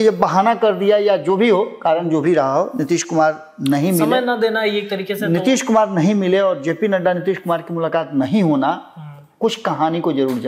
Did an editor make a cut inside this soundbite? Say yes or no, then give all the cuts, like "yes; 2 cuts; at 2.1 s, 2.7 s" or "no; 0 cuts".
no; 0 cuts